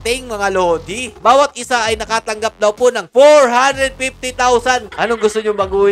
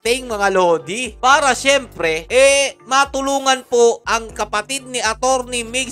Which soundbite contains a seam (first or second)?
first